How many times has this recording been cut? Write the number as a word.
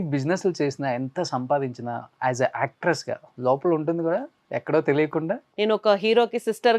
two